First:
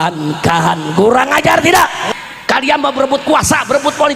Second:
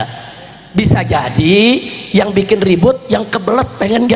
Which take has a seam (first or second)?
first